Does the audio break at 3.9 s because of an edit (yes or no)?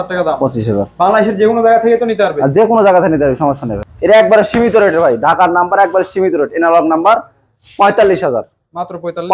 yes